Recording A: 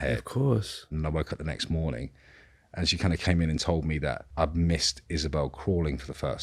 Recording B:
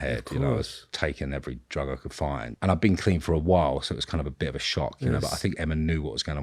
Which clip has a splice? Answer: A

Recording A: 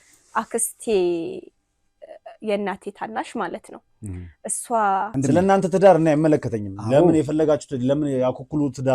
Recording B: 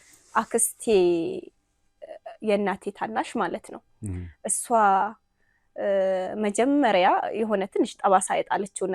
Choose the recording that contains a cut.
A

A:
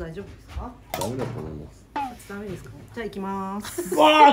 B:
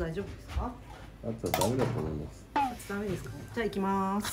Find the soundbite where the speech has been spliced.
A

